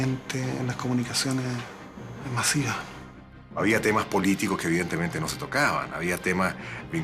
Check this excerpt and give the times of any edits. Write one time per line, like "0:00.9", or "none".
0:03.3